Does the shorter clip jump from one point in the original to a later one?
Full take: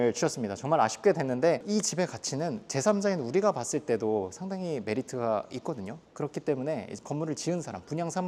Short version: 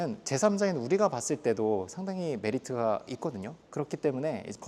no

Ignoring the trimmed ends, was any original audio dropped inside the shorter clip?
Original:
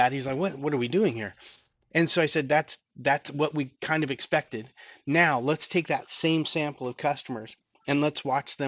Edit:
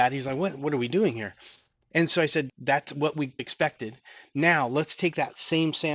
yes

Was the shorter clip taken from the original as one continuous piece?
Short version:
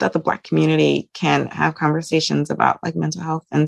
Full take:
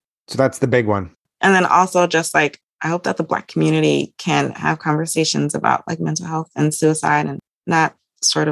yes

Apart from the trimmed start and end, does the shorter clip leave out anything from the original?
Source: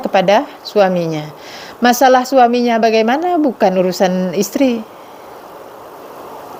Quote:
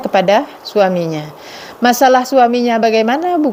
no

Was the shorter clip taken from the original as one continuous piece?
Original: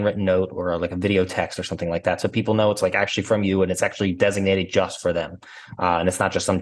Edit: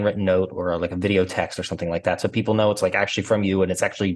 yes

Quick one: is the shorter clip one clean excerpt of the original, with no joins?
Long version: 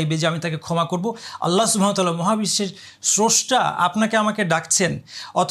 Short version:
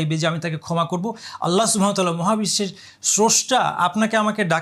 yes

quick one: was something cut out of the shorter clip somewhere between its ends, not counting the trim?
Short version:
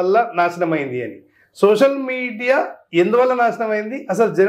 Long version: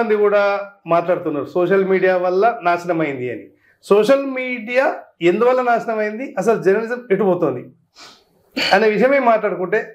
no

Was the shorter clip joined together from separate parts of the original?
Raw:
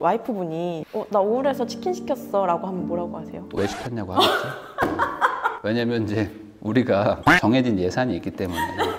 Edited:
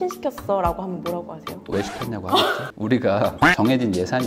yes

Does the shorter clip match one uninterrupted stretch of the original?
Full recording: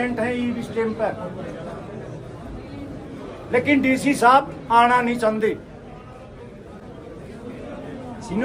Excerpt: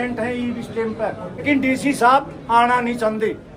no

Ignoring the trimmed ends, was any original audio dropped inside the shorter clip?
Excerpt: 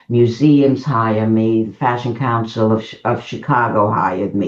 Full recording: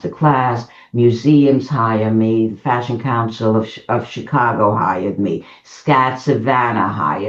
no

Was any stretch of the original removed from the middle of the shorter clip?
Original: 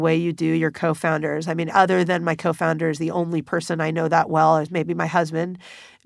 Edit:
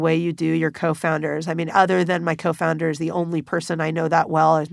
no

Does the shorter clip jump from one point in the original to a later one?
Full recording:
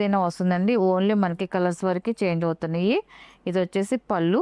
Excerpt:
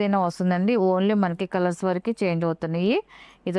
no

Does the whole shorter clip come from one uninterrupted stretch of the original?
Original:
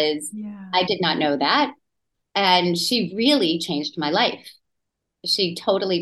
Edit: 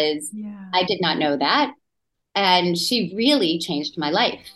yes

